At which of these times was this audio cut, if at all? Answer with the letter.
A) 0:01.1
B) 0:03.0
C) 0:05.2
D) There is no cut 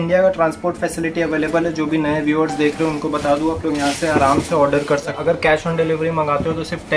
C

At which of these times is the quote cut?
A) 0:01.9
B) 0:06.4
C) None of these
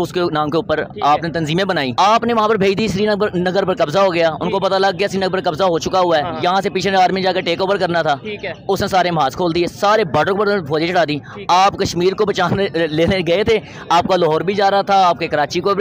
A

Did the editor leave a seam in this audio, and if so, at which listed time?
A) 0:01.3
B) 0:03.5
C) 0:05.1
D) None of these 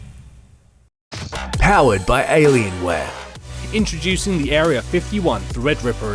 A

